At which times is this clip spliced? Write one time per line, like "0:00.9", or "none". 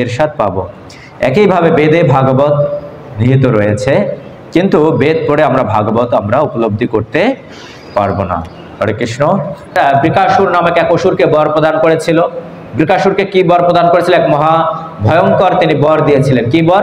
0:09.8

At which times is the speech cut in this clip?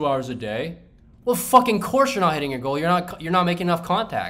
none

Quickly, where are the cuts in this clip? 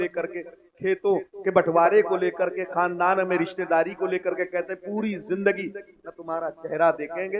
none

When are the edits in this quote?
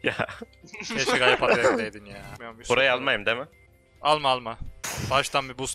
0:02.4

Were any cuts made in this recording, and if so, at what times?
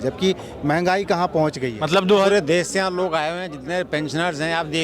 0:02.3

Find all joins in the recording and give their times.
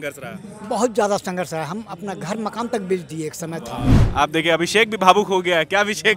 0:03.9

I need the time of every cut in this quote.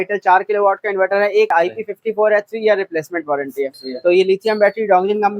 0:01.5
0:03.8

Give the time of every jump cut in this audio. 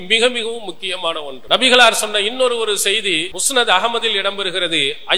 0:01.3
0:03.3

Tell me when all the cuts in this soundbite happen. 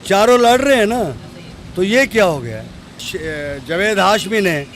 0:03.0

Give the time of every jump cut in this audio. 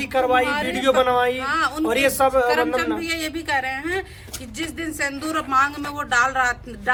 none

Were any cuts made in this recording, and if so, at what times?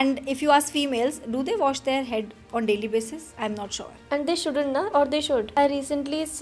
0:05.5

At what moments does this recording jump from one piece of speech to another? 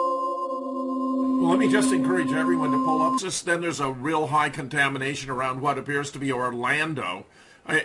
none

